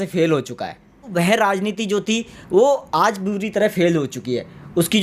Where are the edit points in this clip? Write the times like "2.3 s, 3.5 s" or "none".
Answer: 1.1 s